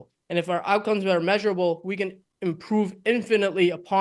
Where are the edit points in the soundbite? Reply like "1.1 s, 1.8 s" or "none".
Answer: none